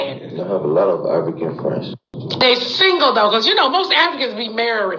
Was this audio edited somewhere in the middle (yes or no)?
yes